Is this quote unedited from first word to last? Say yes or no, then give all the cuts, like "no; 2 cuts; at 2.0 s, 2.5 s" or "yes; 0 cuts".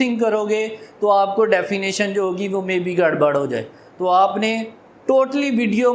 yes; 0 cuts